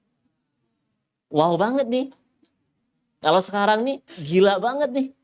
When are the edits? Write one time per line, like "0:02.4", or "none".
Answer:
none